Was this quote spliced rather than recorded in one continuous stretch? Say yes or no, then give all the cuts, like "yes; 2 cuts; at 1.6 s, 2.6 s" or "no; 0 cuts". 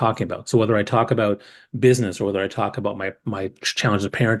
no; 0 cuts